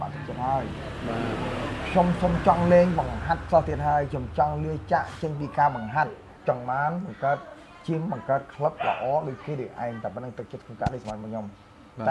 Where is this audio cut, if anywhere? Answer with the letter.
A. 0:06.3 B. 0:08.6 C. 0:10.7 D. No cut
A